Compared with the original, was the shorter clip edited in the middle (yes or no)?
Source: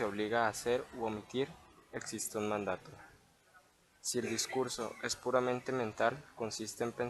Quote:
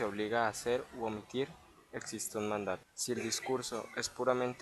yes